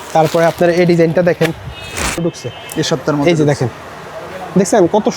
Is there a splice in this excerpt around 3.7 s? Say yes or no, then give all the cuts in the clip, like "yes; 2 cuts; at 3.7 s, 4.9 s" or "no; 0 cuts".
no; 1 cut; at 2.2 s